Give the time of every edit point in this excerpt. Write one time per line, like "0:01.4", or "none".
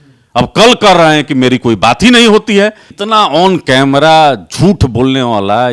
0:02.9